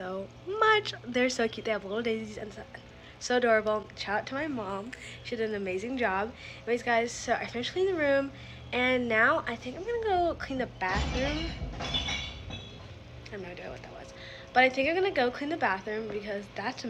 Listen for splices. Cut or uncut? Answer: uncut